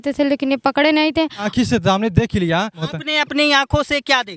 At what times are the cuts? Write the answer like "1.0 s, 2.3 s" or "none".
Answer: 1.5 s, 2.9 s